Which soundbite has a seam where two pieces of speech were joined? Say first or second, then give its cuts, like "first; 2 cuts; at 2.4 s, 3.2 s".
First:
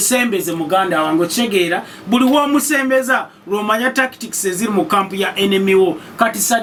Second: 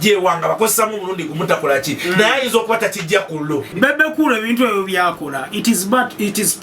second; 1 cut; at 3.7 s